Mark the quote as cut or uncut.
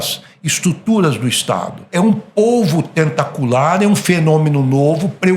cut